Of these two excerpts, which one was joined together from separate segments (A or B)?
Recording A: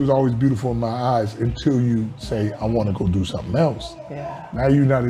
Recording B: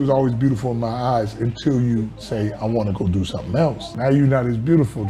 B